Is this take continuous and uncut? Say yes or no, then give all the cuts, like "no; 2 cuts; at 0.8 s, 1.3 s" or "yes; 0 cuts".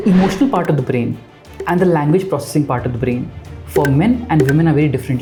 yes; 0 cuts